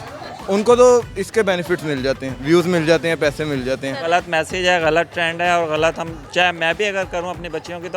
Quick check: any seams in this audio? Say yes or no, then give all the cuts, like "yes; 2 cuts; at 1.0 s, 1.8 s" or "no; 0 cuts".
yes; 1 cut; at 4.0 s